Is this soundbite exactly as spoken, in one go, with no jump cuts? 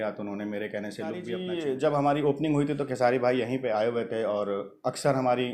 no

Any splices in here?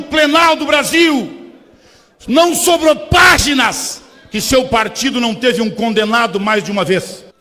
no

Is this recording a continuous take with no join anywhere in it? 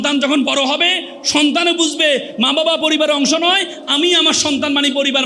yes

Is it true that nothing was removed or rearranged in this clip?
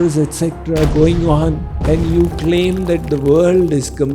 no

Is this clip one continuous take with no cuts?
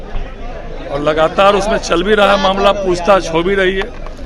yes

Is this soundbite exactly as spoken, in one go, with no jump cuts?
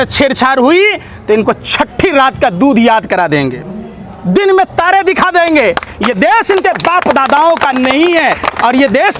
yes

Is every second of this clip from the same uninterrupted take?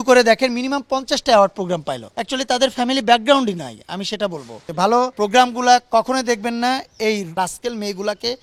no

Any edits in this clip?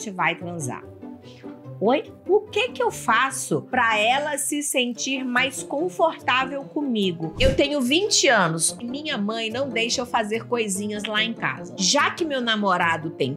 yes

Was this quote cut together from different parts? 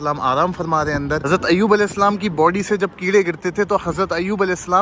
yes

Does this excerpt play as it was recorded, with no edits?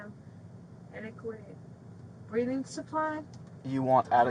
yes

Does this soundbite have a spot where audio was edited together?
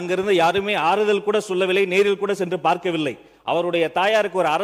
no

